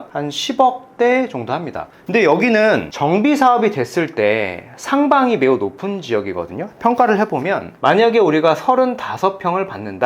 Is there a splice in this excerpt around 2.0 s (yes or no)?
yes